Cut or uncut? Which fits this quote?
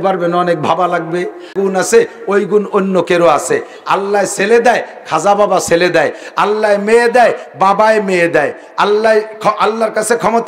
cut